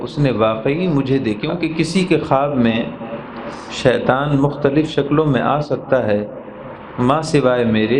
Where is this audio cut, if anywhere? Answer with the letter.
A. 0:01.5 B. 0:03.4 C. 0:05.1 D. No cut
A